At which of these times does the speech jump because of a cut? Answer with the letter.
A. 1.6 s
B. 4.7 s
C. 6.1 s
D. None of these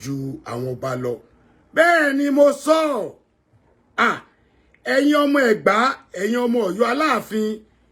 D